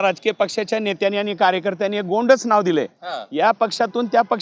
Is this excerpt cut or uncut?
uncut